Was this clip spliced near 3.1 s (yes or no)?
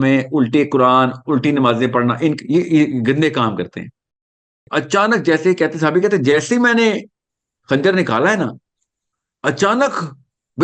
no